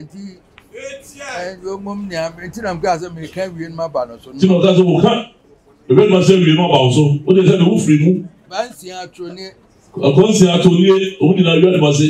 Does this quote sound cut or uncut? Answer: uncut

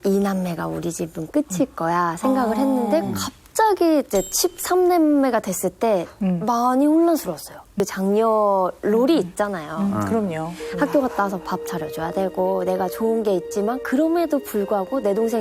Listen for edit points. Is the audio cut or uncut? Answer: cut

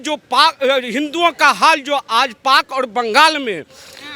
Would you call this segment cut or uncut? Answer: uncut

